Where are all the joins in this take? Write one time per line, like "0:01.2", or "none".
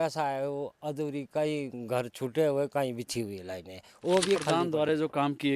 0:04.6